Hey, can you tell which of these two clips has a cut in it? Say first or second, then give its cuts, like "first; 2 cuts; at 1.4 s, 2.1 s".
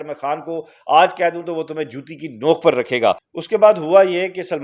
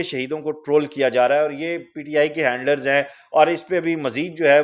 first; 1 cut; at 3.3 s